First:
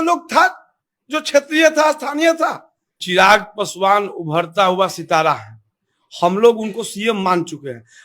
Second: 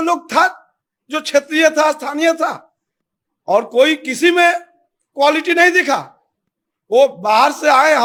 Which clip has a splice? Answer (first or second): first